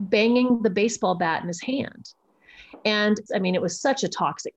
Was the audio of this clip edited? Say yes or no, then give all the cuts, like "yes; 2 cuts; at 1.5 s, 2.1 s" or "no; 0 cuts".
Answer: yes; 1 cut; at 3.2 s